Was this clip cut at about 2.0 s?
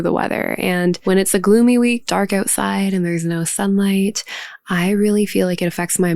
yes; 2 cuts; at 1.0 s, 2.0 s

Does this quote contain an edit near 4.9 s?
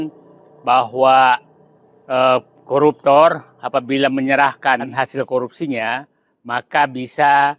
yes; 1 cut; at 4.9 s

